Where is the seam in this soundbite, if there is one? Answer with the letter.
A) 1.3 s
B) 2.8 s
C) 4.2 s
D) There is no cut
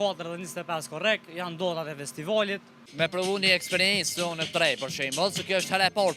B